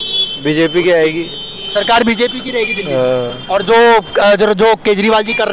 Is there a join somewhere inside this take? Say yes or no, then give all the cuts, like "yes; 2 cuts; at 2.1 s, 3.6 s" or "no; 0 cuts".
no; 0 cuts